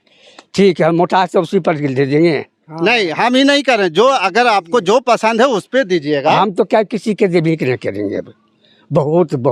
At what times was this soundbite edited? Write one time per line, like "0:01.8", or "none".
none